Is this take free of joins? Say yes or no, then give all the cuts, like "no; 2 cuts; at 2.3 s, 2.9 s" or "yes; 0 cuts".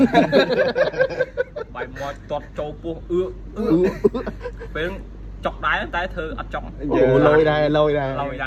yes; 0 cuts